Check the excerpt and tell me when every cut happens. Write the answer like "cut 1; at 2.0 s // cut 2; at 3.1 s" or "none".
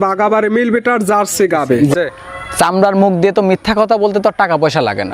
cut 1; at 1.9 s